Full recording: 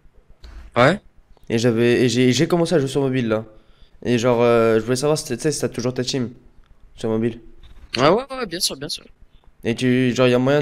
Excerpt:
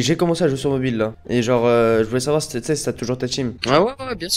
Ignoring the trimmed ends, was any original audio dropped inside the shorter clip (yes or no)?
yes